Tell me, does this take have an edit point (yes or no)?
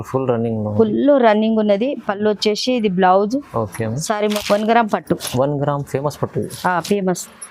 yes